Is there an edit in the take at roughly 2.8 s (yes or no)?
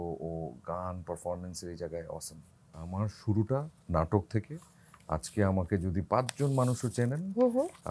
yes